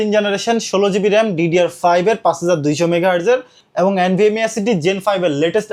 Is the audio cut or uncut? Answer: uncut